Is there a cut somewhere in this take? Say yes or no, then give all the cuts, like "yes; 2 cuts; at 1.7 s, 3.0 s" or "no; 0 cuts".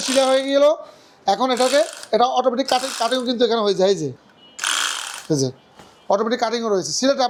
no; 0 cuts